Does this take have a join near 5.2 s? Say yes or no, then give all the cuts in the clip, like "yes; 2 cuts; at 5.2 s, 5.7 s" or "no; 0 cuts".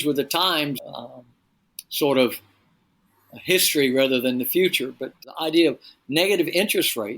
yes; 1 cut; at 5.2 s